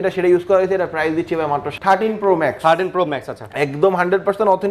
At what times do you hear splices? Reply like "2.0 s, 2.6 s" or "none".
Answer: 1.7 s